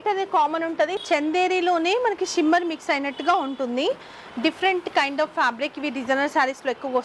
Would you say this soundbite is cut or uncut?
cut